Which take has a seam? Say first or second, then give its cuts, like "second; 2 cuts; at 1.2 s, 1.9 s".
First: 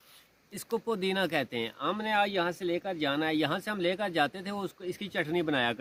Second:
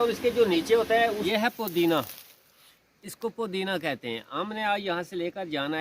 second; 1 cut; at 1.2 s